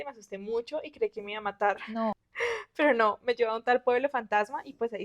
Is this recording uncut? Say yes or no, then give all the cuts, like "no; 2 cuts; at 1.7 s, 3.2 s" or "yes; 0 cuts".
no; 1 cut; at 2.3 s